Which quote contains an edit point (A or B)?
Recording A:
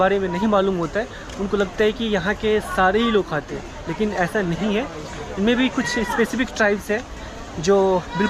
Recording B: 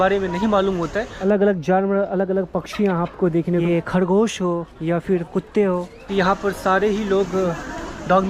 B